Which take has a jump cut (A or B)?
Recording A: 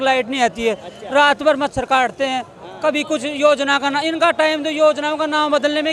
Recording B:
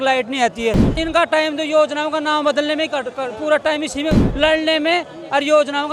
B